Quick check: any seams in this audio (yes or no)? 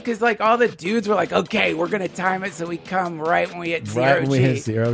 no